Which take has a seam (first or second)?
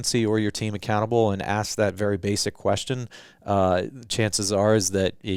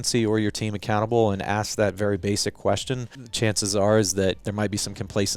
second